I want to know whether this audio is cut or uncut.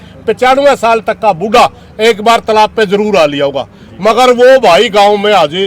uncut